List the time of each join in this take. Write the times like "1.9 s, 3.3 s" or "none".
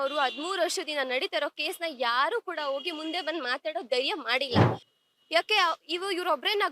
4.8 s